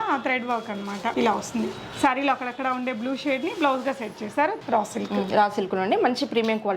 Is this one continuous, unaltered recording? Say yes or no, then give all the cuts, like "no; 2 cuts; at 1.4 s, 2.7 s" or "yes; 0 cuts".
no; 2 cuts; at 1.1 s, 4.6 s